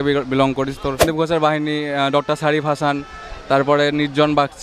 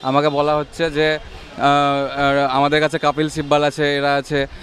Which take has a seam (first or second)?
first